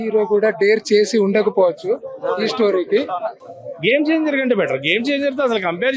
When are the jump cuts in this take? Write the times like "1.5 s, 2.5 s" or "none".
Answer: 3.4 s